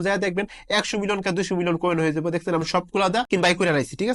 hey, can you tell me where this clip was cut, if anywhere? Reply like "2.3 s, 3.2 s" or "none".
3.3 s